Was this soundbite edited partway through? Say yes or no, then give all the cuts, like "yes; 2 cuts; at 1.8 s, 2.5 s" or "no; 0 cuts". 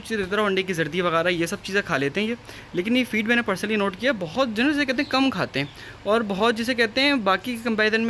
no; 0 cuts